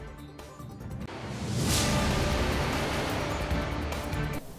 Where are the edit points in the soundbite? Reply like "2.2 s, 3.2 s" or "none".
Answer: 2.9 s